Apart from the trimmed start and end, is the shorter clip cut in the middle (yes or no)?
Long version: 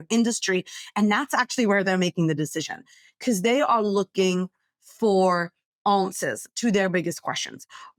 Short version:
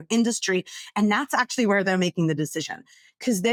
no